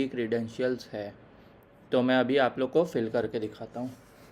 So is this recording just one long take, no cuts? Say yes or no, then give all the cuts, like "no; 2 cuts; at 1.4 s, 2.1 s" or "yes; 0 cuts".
yes; 0 cuts